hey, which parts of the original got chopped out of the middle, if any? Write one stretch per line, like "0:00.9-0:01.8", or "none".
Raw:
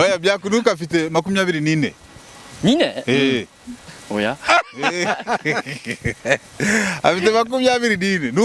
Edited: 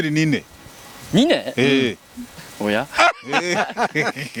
none